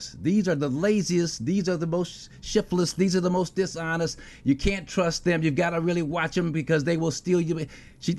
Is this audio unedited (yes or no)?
yes